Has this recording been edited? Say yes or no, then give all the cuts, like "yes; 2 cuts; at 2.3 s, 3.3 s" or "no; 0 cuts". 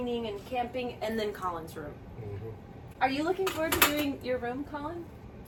no; 0 cuts